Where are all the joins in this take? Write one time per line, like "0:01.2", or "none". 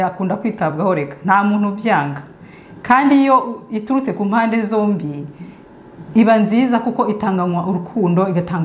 none